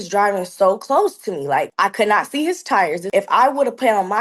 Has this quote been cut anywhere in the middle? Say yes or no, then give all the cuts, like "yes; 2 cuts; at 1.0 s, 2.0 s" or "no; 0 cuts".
yes; 2 cuts; at 1.7 s, 3.0 s